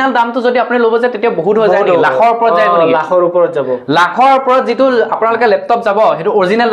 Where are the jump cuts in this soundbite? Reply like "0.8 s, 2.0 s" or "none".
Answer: none

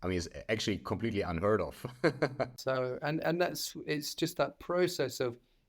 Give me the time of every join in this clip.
2.6 s

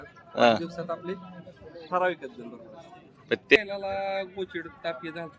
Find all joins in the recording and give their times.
3.6 s

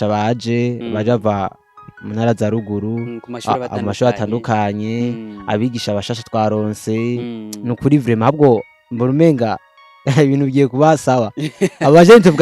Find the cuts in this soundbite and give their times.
none

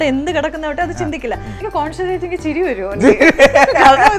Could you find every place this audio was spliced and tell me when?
1.6 s

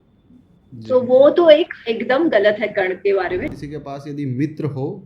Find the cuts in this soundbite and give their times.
3.6 s

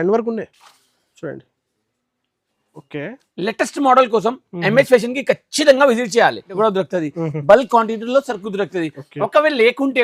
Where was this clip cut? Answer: 6.5 s

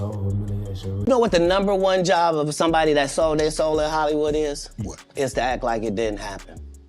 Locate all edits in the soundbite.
1.1 s

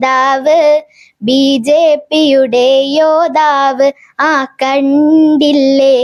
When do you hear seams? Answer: none

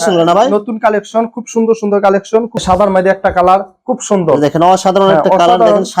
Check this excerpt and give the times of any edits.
2.5 s

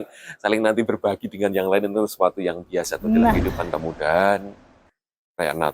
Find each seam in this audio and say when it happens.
3.7 s

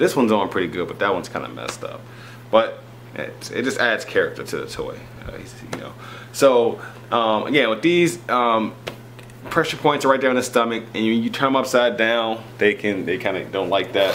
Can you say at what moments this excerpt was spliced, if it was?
none

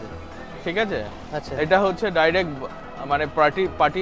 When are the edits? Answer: none

